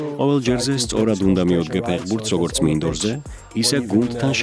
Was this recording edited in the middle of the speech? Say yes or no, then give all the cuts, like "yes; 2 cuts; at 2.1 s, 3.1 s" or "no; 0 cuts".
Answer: no; 0 cuts